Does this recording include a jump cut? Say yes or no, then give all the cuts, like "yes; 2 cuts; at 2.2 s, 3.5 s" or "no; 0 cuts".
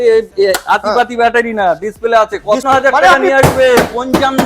yes; 1 cut; at 2.6 s